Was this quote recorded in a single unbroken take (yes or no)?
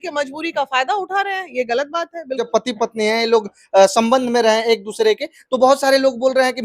no